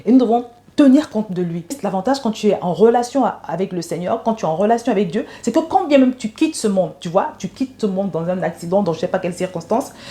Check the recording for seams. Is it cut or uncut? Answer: cut